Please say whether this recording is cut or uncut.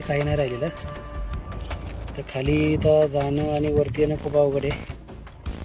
cut